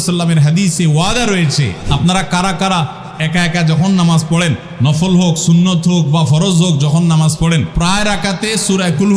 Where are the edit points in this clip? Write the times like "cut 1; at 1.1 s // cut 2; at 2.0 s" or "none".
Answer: cut 1; at 1.8 s // cut 2; at 4.7 s // cut 3; at 7.7 s

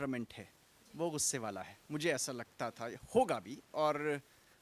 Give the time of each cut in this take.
none

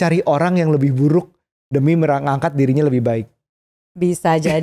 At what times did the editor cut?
none

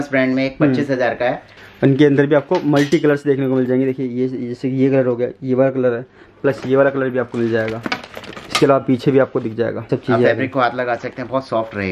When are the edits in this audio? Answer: cut 1; at 1.4 s // cut 2; at 9.9 s

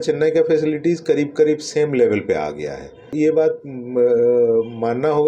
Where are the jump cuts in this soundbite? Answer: cut 1; at 3.1 s

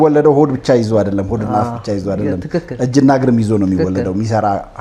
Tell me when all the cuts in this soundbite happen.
none

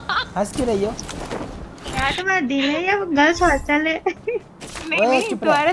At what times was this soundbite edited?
none

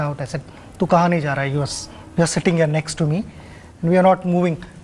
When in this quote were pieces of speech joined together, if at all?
cut 1; at 3.6 s

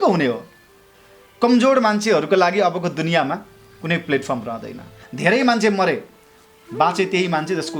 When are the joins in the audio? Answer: cut 1; at 5.1 s

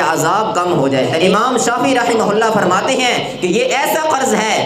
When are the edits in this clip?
cut 1; at 1.2 s

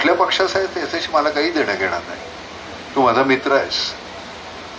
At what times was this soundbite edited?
none

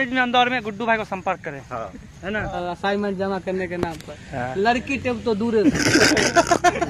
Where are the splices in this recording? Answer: cut 1; at 2.6 s // cut 2; at 5.7 s

